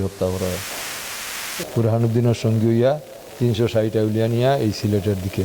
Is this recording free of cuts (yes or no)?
no